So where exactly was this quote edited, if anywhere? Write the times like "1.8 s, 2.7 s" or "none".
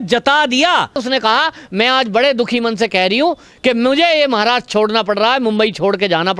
1.0 s